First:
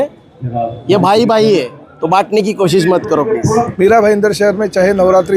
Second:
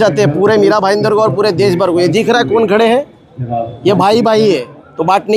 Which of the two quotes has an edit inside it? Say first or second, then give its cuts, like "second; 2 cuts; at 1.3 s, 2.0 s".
first; 1 cut; at 3.7 s